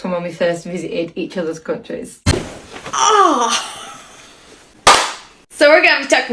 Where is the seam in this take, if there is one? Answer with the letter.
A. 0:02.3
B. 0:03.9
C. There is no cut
A